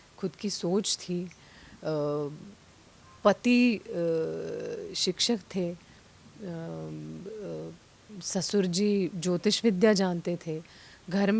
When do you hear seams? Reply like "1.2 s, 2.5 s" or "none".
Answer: none